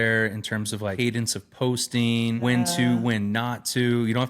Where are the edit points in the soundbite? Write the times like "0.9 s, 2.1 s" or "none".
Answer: 0.9 s, 2.4 s